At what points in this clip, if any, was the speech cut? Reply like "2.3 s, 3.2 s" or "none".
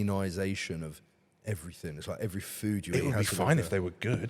none